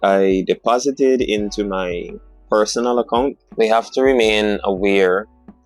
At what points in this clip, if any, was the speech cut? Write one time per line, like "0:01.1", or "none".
0:03.4